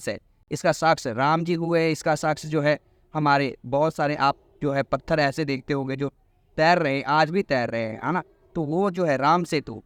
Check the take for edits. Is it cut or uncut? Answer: uncut